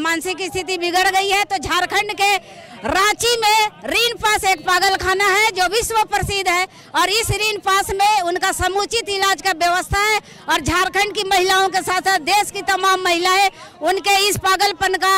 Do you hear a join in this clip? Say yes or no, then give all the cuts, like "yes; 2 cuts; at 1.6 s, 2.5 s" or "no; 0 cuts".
no; 0 cuts